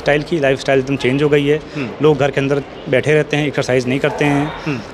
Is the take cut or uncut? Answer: uncut